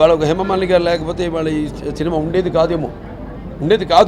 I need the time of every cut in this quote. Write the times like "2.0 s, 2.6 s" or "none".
none